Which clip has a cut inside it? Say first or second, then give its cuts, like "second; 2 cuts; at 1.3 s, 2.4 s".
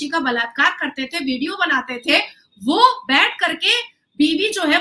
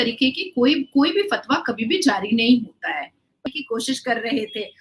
second; 1 cut; at 3.5 s